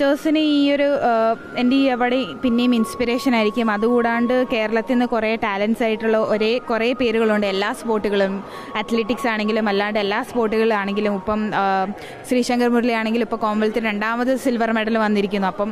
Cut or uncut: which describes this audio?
uncut